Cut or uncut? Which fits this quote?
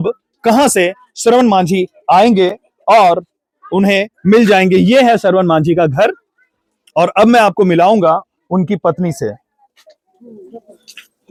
uncut